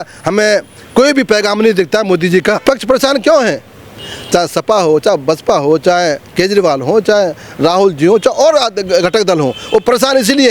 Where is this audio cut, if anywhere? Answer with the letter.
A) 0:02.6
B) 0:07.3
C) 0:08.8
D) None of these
A